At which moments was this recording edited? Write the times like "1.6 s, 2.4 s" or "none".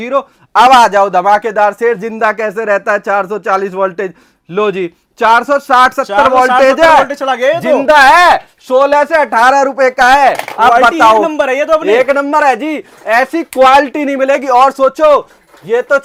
none